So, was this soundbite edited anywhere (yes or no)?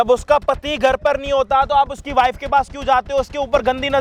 no